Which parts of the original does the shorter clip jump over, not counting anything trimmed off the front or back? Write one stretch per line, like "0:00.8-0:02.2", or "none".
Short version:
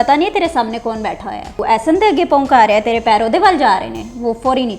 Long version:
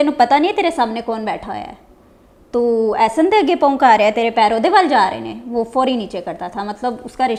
0:01.8-0:02.9